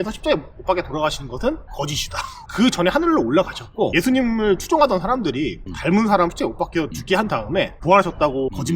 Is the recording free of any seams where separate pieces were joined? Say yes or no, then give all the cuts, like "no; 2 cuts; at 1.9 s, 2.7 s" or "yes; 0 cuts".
no; 1 cut; at 2.3 s